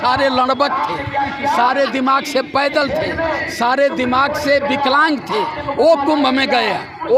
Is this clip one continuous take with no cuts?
yes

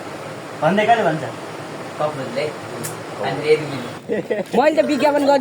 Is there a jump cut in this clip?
yes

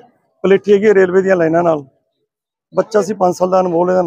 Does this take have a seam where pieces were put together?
no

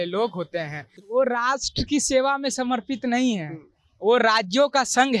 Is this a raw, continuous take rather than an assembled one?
no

